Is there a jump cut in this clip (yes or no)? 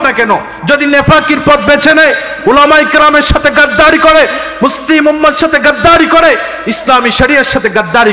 no